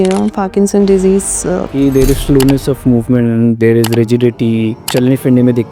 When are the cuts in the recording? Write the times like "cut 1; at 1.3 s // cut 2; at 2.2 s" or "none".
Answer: cut 1; at 1.7 s